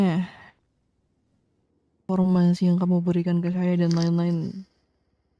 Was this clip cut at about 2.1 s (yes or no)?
yes